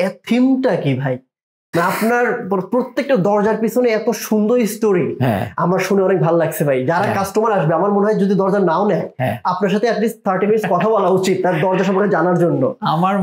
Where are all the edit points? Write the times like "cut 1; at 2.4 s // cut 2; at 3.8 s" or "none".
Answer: none